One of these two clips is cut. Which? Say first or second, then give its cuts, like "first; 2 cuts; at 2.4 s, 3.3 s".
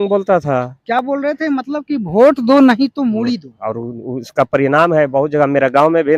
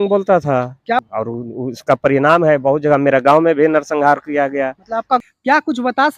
second; 2 cuts; at 1.0 s, 5.2 s